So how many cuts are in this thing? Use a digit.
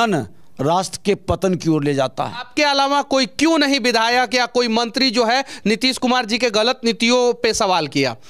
1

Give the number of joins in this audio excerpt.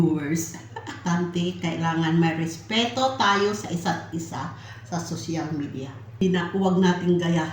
2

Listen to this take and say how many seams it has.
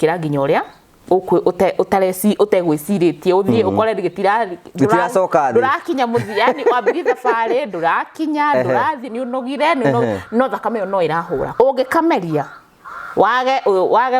1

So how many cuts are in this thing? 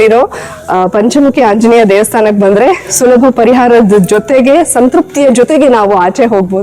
0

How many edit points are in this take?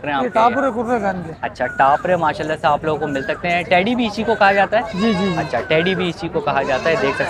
0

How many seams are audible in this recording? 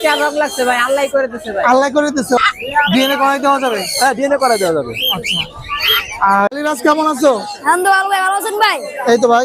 2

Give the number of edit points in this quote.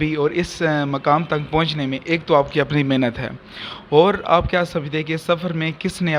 0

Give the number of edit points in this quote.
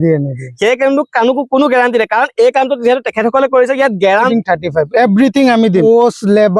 2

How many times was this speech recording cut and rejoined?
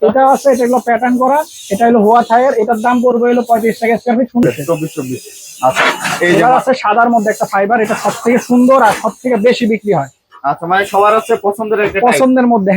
1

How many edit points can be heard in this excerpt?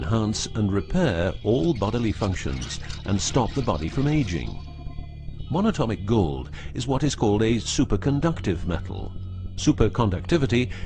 0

